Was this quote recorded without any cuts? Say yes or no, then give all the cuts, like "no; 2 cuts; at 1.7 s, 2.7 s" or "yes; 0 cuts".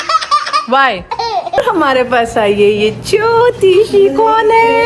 no; 1 cut; at 1.5 s